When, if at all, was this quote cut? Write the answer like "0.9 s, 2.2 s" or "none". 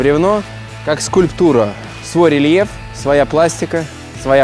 none